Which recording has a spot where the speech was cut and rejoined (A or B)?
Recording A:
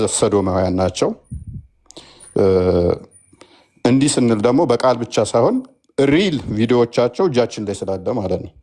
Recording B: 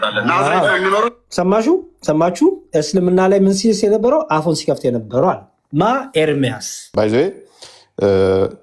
B